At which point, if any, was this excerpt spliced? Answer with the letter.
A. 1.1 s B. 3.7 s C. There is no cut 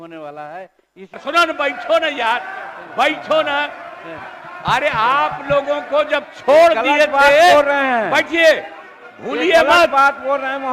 A